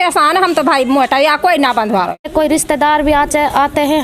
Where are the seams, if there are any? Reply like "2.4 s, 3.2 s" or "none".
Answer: 2.3 s